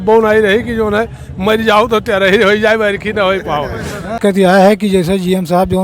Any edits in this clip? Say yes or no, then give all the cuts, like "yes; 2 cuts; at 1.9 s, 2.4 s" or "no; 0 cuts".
yes; 1 cut; at 4.2 s